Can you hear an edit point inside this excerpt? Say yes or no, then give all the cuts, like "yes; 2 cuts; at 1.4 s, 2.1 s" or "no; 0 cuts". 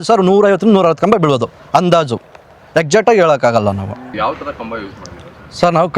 no; 0 cuts